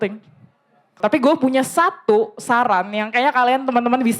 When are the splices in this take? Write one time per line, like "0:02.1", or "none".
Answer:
0:01.0